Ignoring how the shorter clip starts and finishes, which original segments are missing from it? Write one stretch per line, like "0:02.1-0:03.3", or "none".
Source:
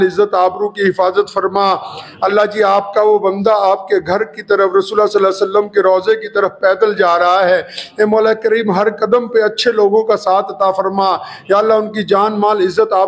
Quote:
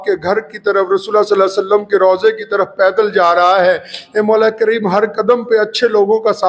none